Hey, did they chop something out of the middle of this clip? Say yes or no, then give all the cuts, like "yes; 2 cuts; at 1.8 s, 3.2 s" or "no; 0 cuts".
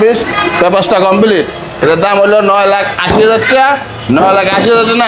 no; 0 cuts